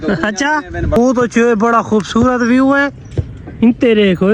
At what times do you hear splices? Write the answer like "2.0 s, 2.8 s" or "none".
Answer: 1.0 s